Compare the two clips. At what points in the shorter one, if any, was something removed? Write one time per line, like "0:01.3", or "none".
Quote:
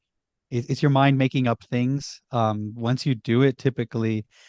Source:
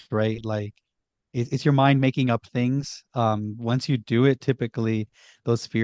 none